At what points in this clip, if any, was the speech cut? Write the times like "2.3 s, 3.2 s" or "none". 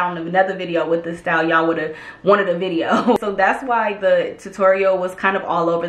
3.2 s